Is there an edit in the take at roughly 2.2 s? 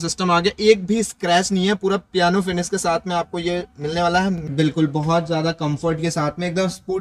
no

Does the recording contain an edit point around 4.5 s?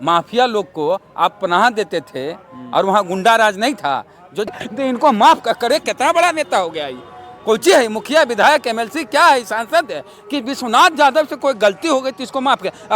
yes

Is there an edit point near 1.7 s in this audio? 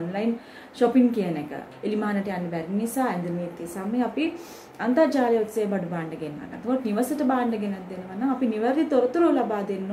yes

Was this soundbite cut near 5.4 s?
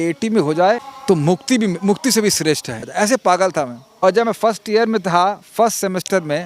no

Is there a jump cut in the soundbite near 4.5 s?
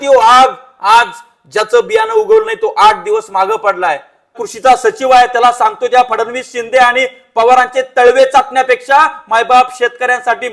yes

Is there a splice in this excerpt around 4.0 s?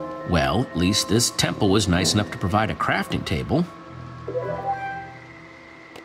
no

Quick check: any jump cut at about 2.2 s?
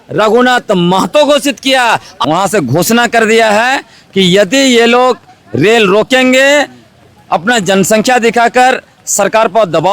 yes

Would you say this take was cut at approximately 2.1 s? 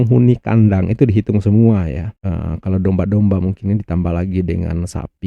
no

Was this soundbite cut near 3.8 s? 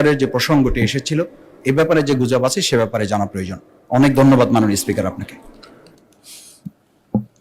no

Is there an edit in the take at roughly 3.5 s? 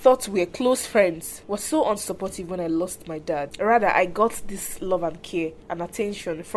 yes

